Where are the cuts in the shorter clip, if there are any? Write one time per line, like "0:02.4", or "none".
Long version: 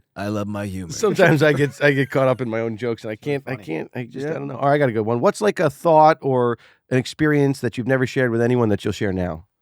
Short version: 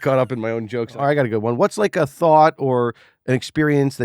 0:00.9